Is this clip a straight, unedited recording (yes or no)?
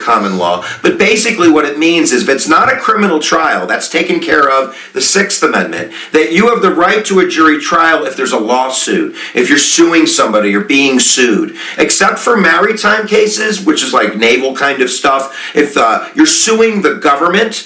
yes